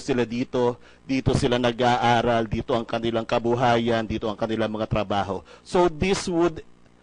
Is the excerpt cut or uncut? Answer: cut